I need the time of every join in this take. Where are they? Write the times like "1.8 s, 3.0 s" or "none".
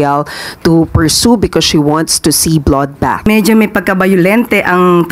3.3 s